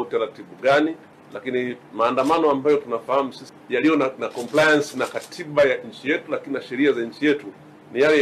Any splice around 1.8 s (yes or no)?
no